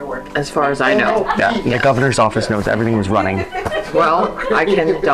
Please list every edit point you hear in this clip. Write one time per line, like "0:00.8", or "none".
0:01.4